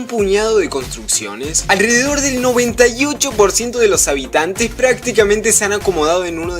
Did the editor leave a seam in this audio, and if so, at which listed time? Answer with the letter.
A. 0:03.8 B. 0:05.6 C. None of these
B